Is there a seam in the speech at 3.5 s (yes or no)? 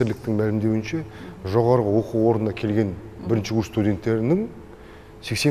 no